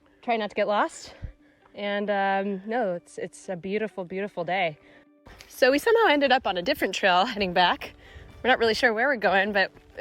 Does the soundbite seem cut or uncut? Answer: cut